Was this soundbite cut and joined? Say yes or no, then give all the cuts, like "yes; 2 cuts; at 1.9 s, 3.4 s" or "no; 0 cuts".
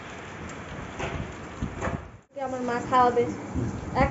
yes; 1 cut; at 2.5 s